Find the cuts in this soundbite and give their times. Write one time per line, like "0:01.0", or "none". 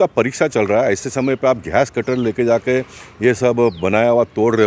none